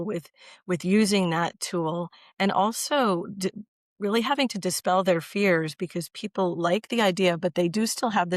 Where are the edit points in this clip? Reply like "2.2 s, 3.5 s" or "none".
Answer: none